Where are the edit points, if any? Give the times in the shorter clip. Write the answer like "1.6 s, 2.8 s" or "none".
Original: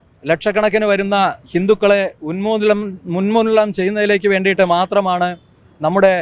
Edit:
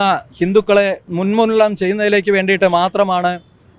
1.0 s